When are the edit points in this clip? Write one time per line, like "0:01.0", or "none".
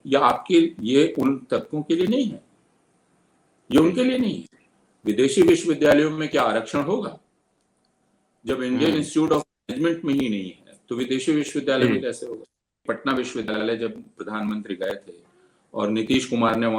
0:12.8